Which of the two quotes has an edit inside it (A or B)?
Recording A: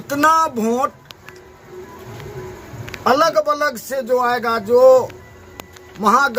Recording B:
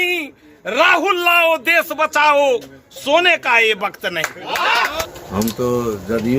B